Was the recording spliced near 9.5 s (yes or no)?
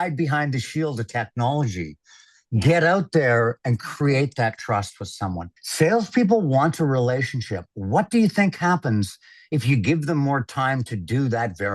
no